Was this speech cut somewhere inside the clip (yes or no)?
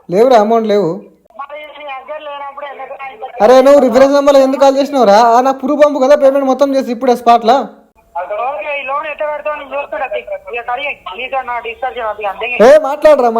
yes